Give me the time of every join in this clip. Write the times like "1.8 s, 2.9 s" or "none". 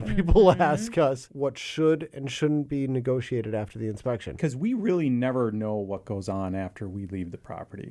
1.3 s, 4.4 s